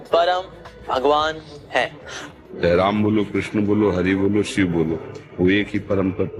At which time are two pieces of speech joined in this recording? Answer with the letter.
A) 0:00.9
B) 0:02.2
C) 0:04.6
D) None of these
B